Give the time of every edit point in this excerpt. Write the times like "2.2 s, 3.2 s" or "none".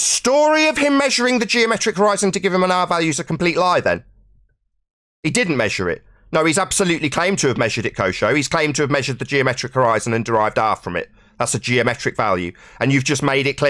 none